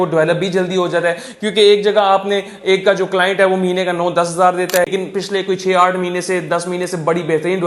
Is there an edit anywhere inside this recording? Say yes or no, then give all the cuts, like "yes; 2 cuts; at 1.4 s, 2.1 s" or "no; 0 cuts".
yes; 1 cut; at 4.9 s